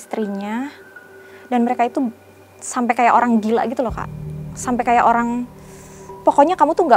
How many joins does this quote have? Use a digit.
0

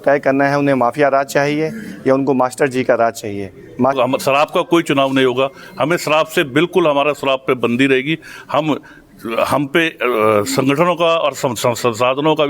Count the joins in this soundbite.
1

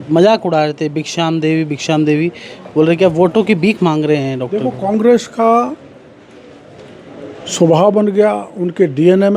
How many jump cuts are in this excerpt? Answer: 0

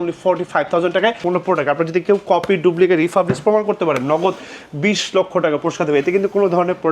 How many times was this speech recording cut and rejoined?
1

